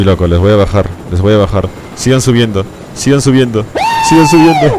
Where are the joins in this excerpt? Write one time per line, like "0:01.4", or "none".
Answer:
0:01.8